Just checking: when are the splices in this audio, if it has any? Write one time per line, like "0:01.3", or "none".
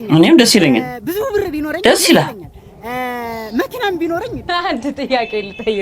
0:04.5